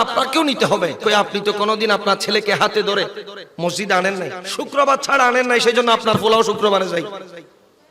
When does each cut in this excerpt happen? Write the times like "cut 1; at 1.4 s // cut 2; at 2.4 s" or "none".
cut 1; at 1.0 s // cut 2; at 4.4 s